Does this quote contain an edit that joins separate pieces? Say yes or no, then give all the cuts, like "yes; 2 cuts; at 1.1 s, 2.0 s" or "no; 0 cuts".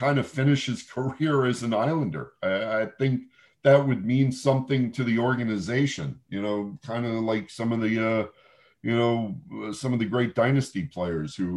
no; 0 cuts